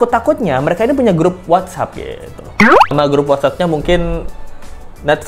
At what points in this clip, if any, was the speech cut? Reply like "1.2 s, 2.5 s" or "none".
2.9 s

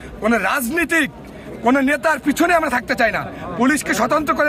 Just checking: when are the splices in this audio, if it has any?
none

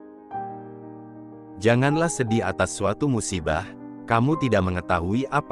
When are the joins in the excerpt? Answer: 1.6 s

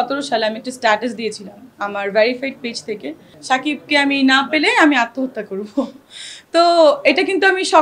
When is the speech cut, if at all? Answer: 3.3 s

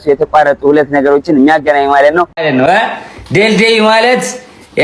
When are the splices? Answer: 2.4 s

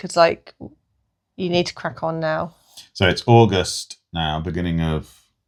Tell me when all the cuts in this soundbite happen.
none

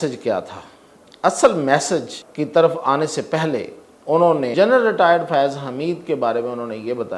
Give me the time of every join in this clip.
2.2 s, 4.5 s

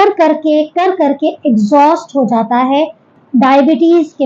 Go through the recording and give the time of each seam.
3.1 s

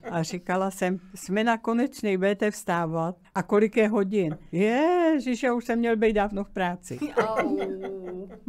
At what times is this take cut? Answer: 3.2 s, 4.5 s

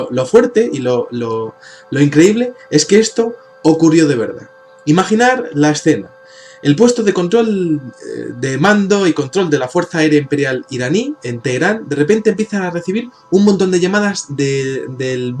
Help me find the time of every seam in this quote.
none

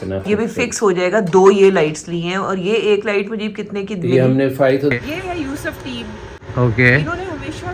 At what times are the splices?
4.9 s, 6.3 s

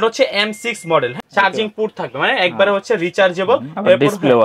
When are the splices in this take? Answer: 1.2 s

